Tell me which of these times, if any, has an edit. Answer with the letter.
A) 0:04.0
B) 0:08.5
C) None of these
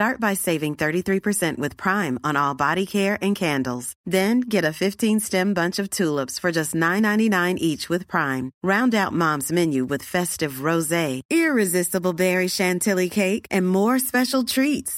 C